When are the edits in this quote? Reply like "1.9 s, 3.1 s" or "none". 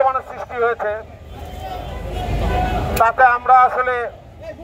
none